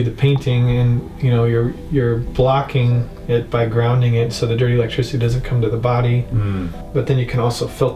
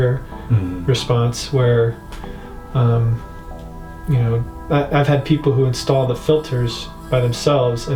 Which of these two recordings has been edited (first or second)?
first